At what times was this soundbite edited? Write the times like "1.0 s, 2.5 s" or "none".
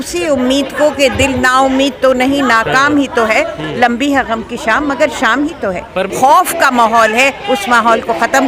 6.1 s